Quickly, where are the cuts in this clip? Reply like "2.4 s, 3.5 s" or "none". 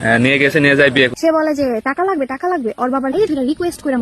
1.1 s

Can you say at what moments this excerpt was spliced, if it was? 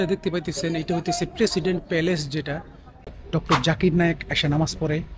3.1 s

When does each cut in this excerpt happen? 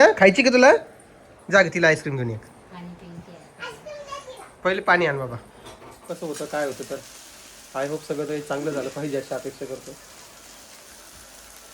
6.0 s

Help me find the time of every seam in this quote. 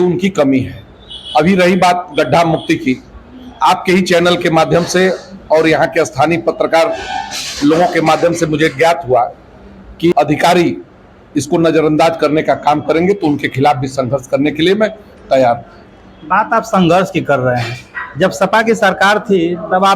10.1 s

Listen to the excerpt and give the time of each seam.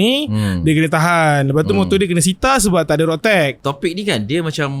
3.6 s

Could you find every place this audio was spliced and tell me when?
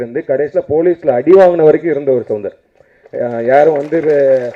none

